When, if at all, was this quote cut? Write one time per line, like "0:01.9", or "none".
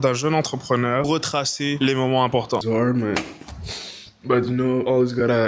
0:01.1
0:02.6